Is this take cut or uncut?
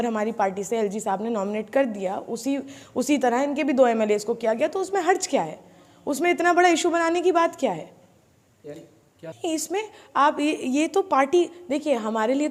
uncut